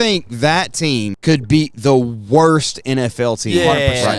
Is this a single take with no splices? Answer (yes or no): no